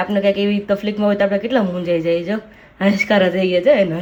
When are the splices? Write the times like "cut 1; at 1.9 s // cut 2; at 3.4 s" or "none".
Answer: none

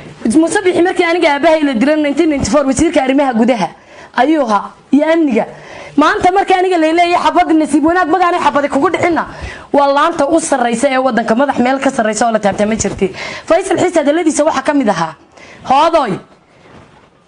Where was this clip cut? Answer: cut 1; at 12.7 s

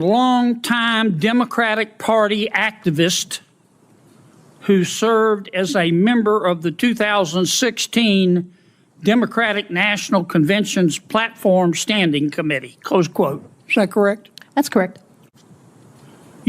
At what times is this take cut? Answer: cut 1; at 15.2 s

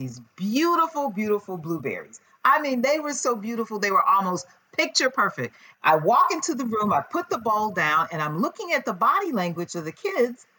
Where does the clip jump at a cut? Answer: cut 1; at 5.6 s

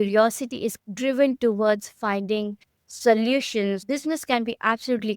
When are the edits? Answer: cut 1; at 3.9 s

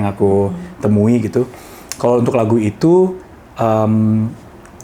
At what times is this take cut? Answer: none

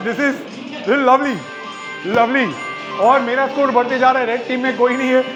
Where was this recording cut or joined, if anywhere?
none

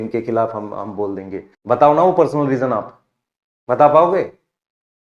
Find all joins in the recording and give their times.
cut 1; at 1.4 s

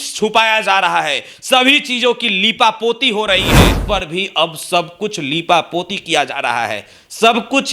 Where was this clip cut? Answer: cut 1; at 3.8 s

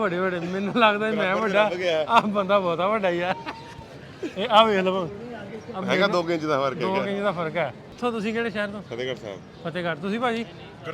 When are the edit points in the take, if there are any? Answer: cut 1; at 7.9 s

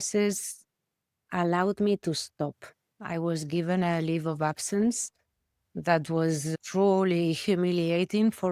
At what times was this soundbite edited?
cut 1; at 6.5 s

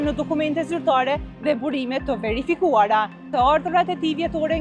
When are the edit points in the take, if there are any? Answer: cut 1; at 3.3 s

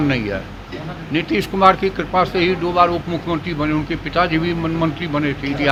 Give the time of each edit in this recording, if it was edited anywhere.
none

